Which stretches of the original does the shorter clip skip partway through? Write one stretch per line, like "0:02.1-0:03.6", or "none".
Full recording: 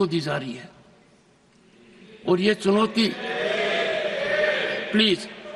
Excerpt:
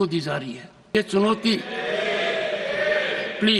0:00.9-0:02.5